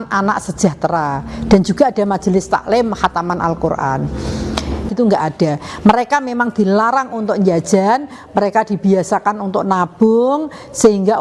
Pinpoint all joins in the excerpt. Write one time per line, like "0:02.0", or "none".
0:04.9